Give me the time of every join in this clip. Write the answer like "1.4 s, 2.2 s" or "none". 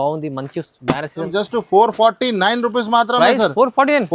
1.3 s